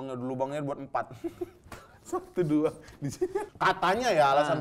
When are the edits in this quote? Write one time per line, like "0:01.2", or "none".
0:03.4